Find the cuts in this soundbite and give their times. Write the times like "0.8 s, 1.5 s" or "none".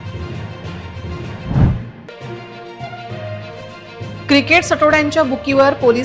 1.9 s